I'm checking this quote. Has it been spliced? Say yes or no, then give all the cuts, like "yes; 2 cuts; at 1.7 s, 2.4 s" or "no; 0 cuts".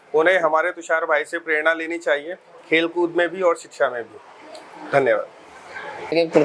no; 0 cuts